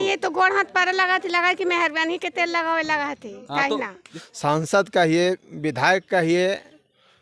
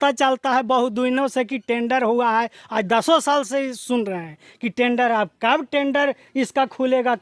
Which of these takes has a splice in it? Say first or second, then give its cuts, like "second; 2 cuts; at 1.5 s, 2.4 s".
first; 1 cut; at 4.0 s